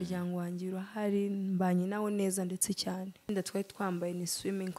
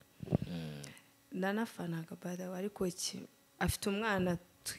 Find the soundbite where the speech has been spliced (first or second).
first